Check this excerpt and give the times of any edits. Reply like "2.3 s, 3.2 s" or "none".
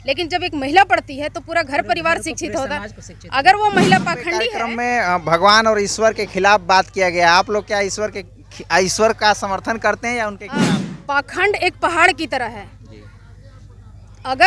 4.6 s, 10.9 s